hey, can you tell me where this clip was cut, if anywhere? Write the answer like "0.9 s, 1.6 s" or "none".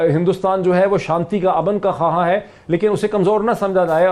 none